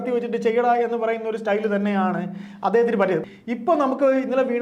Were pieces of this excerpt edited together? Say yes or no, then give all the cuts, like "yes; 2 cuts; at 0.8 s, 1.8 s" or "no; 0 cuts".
yes; 1 cut; at 3.2 s